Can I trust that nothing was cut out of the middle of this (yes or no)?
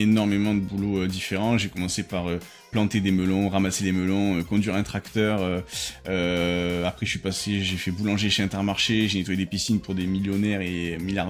yes